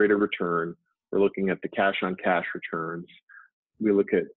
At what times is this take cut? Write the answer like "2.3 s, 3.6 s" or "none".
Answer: 3.4 s